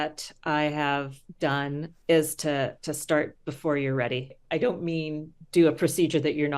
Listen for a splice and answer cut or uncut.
cut